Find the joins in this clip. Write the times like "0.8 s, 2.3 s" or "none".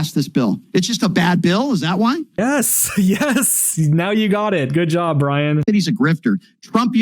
5.6 s